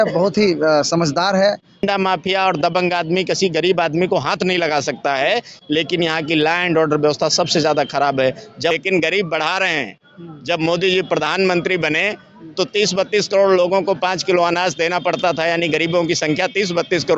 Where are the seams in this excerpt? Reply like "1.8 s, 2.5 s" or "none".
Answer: 1.9 s, 8.7 s

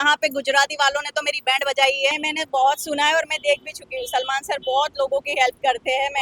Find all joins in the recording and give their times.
2.2 s

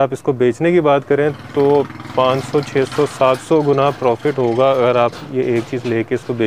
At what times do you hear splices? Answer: none

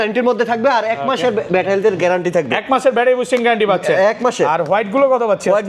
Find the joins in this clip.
none

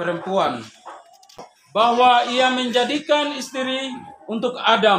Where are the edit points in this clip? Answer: 1.5 s

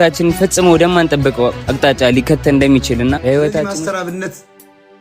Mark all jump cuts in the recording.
3.6 s

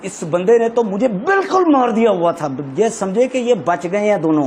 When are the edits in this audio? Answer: none

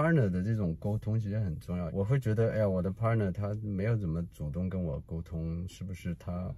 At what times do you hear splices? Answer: 1.9 s

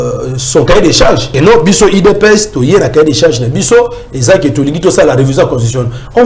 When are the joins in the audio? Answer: 1.3 s

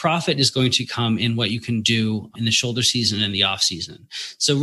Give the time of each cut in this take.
2.3 s

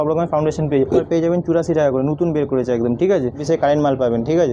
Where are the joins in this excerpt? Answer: 1.1 s, 3.4 s

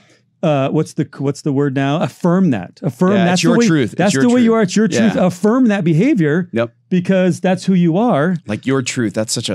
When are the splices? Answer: none

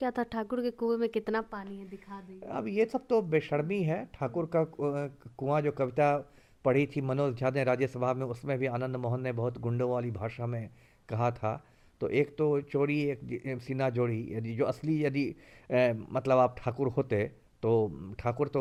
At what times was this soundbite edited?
none

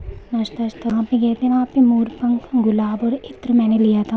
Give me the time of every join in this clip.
0.9 s

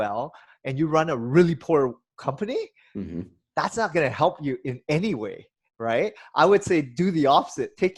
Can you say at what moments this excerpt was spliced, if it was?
none

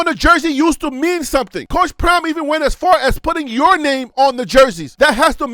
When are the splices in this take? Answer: none

